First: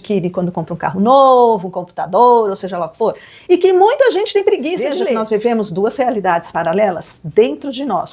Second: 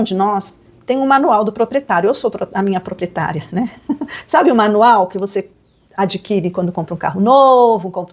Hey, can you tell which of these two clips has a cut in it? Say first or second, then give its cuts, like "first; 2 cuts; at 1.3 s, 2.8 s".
first; 1 cut; at 5.0 s